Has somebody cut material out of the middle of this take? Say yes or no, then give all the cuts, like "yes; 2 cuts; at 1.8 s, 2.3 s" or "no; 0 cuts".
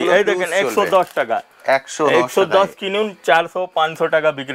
no; 0 cuts